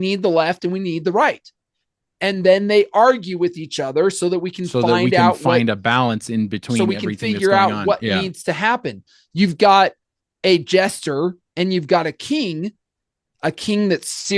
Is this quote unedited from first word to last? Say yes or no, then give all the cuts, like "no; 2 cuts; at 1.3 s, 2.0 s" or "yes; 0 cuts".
yes; 0 cuts